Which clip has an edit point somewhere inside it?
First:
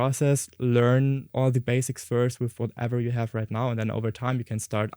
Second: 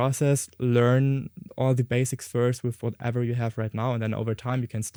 first; 1 cut; at 1.2 s

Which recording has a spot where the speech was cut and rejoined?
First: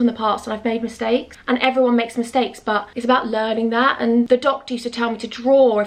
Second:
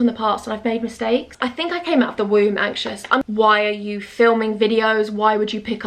second; 2 cuts; at 1.3 s, 3.2 s

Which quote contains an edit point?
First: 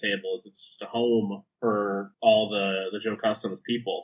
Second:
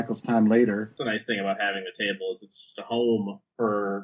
second; 1 cut; at 1.0 s

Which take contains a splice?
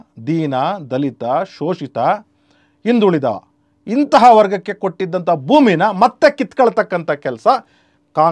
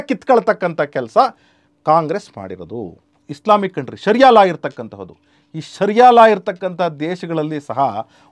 second; 1 cut; at 3.1 s

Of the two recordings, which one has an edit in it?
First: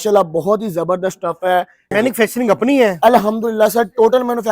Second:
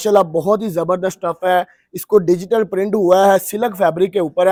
first; 1 cut; at 1.8 s

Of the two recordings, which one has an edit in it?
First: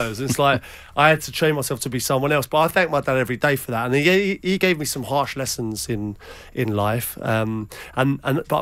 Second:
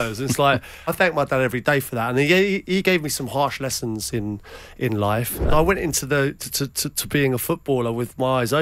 second; 2 cuts; at 0.9 s, 5.5 s

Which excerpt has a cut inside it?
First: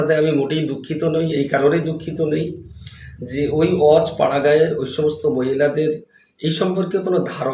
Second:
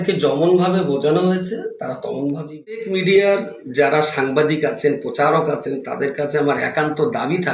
second; 1 cut; at 2.8 s

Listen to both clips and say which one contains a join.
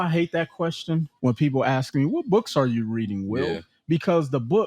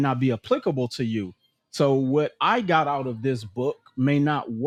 first; 1 cut; at 1.1 s

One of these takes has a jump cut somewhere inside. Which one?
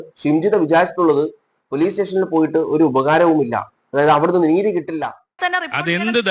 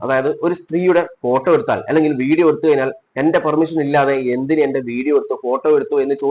first; 1 cut; at 5.3 s

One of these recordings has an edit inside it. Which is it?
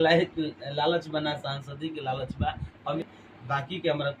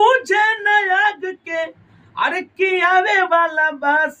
first; 1 cut; at 3.0 s

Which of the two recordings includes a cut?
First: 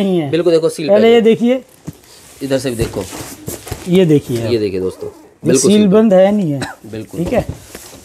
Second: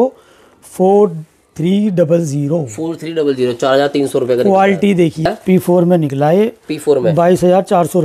second; 1 cut; at 5.2 s

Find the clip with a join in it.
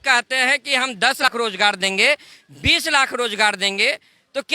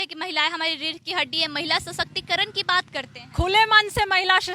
first; 1 cut; at 1.3 s

